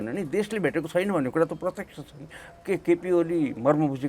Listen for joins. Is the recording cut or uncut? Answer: uncut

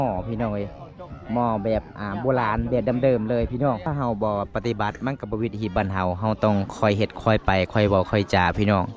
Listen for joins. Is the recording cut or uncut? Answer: cut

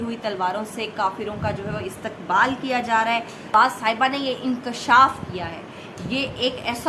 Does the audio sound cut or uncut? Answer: cut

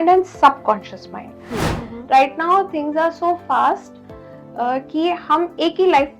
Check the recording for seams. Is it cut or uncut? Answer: cut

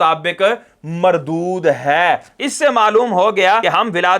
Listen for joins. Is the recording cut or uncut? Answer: cut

